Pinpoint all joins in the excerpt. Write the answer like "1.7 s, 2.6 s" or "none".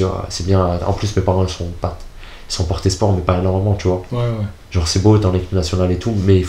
none